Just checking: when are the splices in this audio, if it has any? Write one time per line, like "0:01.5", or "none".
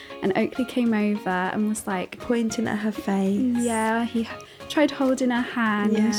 none